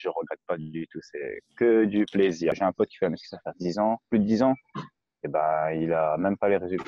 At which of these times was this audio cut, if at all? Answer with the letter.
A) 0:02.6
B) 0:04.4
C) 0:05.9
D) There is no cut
A